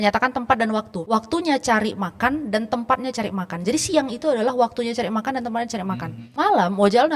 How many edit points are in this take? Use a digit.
2